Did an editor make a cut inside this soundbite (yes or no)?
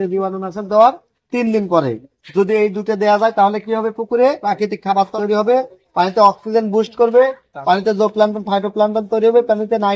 no